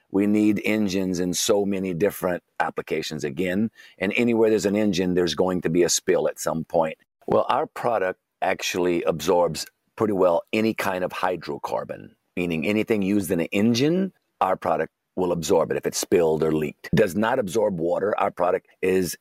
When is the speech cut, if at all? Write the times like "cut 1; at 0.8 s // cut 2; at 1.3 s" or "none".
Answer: cut 1; at 7.1 s // cut 2; at 16.8 s